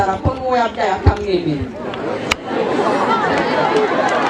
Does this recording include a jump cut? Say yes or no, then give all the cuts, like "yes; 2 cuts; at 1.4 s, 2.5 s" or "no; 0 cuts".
no; 0 cuts